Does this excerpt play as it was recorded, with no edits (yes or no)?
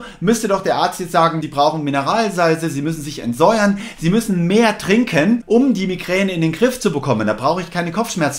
no